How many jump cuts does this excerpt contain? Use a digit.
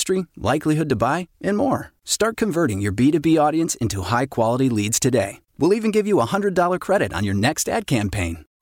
0